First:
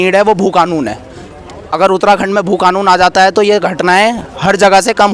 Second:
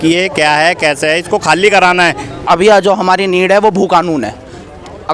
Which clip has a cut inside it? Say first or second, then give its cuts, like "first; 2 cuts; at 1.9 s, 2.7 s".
second; 1 cut; at 2.5 s